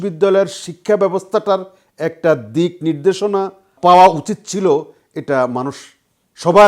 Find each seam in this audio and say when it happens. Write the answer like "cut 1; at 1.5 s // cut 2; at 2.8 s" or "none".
cut 1; at 3.7 s